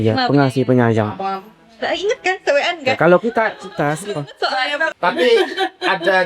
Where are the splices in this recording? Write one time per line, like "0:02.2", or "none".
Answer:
0:04.9